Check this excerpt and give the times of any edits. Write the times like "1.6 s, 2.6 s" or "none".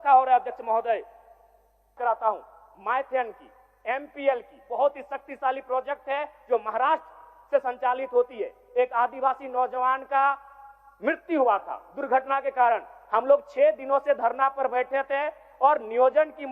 2.0 s